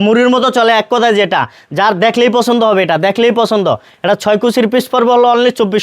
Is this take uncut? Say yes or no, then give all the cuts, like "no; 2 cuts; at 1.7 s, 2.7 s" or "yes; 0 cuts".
yes; 0 cuts